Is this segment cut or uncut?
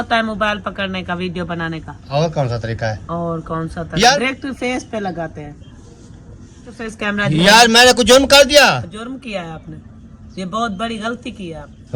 cut